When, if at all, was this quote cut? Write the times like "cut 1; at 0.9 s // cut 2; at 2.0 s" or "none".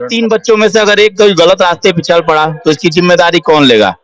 none